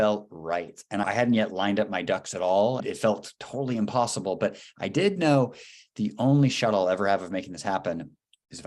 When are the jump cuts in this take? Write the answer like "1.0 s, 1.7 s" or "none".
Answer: 1.0 s, 2.8 s